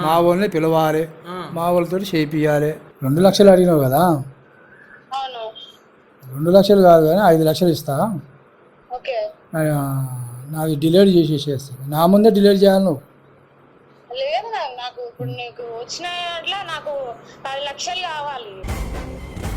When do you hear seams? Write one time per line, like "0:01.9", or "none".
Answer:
0:02.9